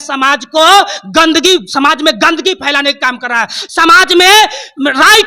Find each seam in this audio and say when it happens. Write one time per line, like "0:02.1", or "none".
none